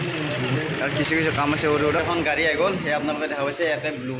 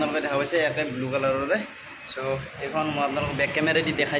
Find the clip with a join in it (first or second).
first